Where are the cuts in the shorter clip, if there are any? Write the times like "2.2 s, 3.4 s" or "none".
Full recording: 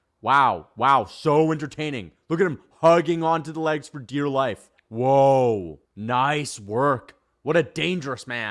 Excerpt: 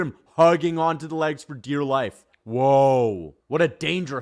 3.3 s